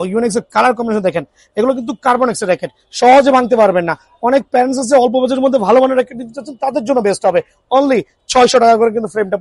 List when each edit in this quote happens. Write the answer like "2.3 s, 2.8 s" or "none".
none